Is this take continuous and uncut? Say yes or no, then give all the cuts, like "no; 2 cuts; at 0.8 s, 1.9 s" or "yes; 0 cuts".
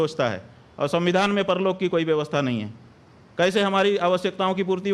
yes; 0 cuts